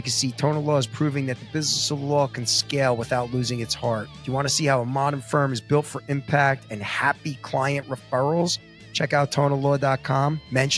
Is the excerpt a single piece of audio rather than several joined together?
yes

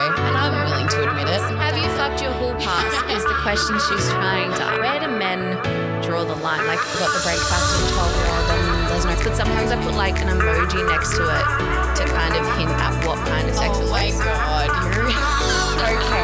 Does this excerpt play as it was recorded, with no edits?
yes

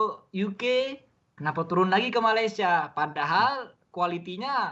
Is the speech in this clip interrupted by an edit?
no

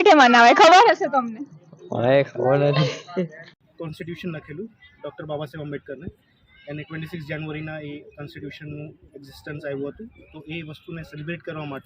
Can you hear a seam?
yes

